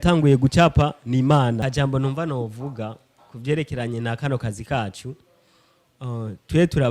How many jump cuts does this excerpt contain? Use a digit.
1